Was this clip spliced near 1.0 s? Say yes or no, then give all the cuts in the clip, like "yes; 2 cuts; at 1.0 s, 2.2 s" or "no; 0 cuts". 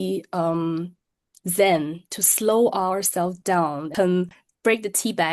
no; 1 cut; at 3.9 s